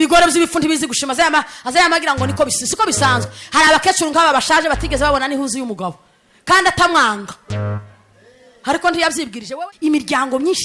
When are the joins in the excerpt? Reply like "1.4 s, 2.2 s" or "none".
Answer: 9.4 s